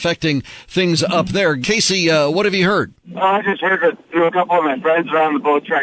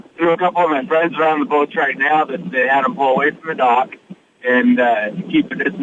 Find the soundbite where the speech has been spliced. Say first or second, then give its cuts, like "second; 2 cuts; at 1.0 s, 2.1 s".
first; 2 cuts; at 1.6 s, 3.0 s